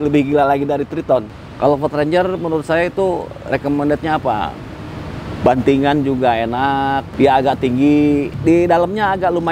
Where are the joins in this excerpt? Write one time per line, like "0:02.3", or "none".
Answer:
0:01.4
0:07.1
0:08.3